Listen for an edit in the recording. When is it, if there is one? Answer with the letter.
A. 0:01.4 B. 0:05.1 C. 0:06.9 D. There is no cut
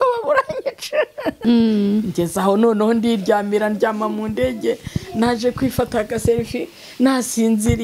A